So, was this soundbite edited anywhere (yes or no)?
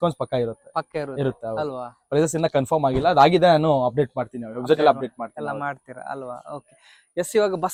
no